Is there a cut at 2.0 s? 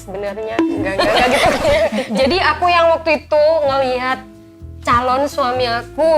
yes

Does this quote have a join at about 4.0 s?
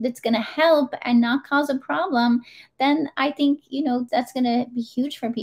yes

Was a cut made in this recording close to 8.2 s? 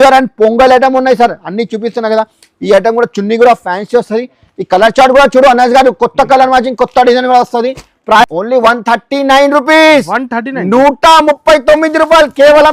yes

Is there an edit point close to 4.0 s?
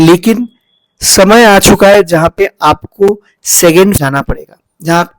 yes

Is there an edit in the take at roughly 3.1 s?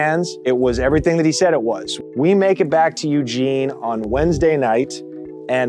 no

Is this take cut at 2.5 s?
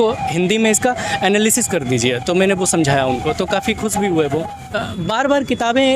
no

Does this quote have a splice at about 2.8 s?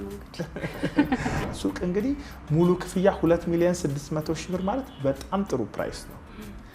no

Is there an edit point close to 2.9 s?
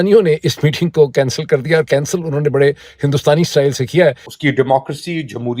no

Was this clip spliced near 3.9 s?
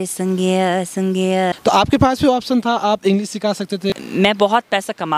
yes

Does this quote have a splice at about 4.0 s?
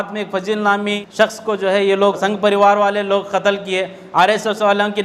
no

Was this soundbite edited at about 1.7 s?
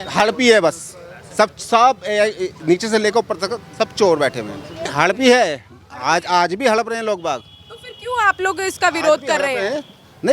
no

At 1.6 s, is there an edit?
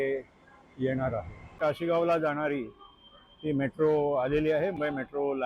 yes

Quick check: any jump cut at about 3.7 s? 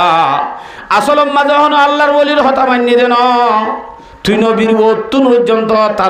no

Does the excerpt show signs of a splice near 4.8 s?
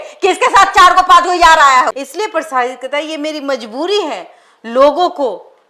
no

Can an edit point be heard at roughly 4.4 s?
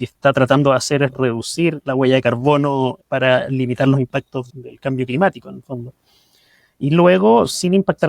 yes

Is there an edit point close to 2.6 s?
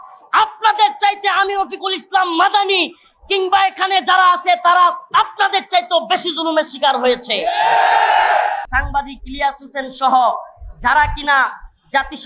no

